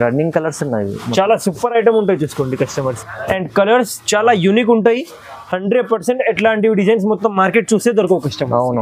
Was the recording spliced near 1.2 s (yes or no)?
no